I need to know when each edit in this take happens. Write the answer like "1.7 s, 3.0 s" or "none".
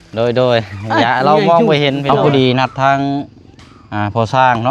2.2 s

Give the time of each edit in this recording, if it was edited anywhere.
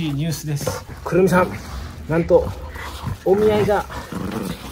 0.9 s

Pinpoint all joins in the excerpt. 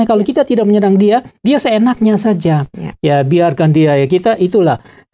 none

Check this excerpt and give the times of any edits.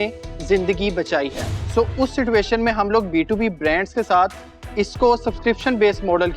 1.4 s

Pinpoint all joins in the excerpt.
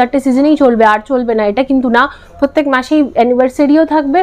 none

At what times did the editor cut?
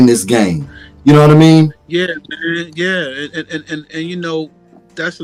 none

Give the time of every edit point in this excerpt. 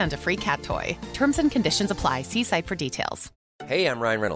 3.3 s

